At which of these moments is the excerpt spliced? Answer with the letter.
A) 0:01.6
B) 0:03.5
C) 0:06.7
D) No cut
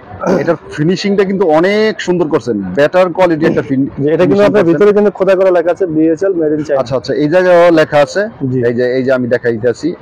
D